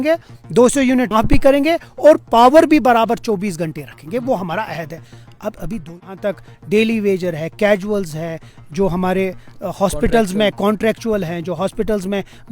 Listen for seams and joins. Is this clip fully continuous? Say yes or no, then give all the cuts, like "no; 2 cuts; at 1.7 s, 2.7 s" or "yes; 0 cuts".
no; 2 cuts; at 1.1 s, 5.8 s